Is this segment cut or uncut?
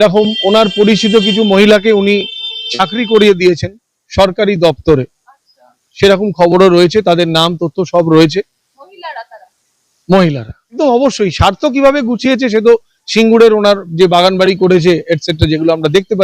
cut